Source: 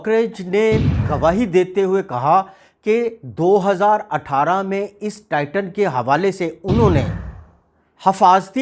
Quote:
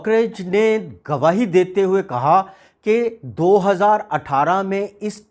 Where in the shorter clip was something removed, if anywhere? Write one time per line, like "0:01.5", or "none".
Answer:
none